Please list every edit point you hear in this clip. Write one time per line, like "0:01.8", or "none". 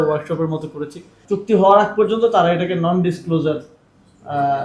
0:01.2